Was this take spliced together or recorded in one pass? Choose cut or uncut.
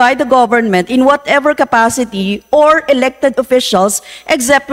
uncut